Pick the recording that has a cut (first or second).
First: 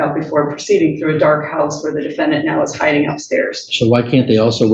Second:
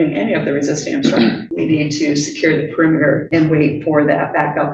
second